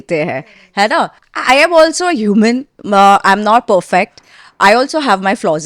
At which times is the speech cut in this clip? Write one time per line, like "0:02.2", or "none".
0:01.2